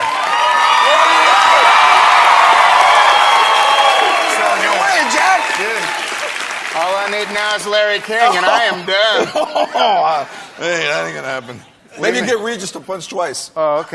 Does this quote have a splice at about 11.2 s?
yes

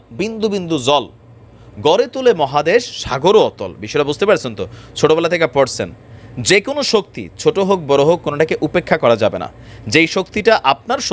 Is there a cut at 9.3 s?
no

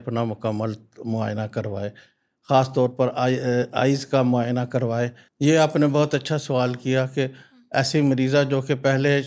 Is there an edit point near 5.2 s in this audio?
yes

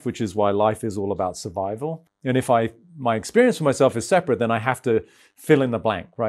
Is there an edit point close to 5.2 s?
no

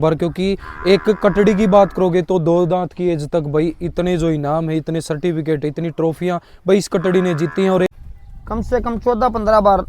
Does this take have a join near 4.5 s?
no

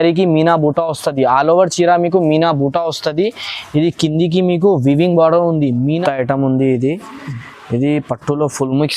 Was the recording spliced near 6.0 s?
yes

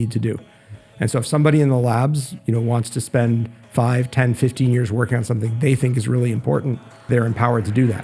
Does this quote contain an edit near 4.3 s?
no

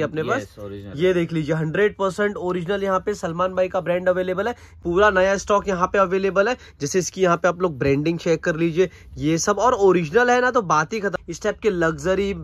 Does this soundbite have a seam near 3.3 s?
no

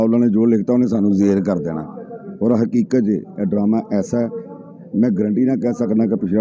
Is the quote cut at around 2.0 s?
no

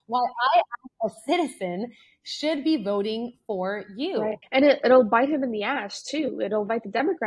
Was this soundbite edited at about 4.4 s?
yes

